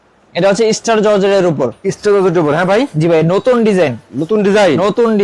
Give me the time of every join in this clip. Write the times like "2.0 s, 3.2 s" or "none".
none